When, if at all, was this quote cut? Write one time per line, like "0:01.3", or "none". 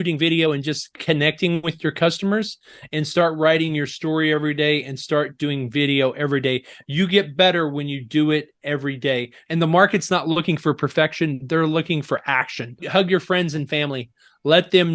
0:09.4
0:12.8

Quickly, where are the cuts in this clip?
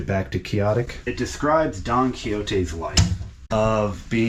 0:01.0
0:03.3

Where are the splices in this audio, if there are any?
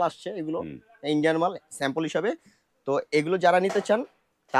none

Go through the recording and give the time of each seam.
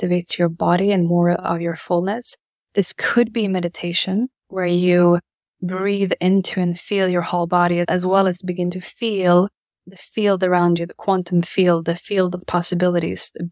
0:04.4
0:07.9
0:09.8

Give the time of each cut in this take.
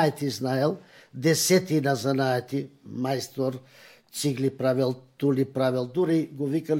none

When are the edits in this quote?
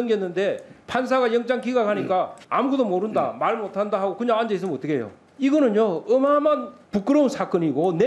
0:02.4
0:05.2
0:06.8

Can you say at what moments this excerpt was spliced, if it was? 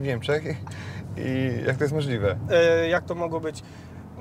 none

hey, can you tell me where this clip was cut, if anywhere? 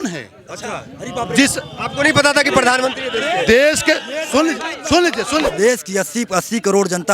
0:05.5

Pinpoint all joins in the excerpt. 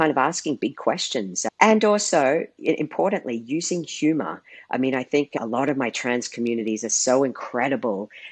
0:05.4

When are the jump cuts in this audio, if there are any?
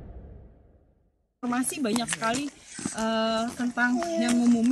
0:01.3

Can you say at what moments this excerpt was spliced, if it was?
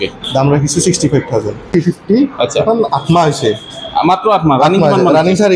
0:01.7

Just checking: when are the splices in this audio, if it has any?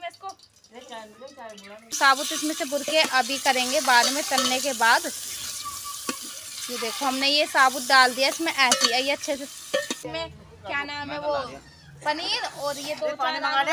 0:01.8
0:10.1

